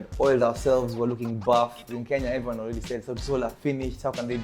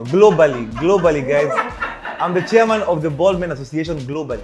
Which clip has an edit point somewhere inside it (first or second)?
first